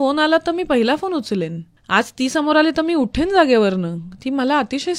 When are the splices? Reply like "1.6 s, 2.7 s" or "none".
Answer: none